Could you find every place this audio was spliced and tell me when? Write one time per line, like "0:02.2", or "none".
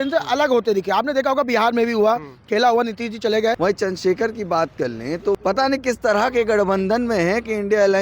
0:03.6
0:04.8